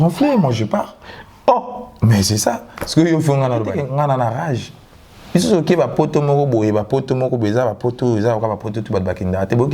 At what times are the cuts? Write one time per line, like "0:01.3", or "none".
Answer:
0:03.8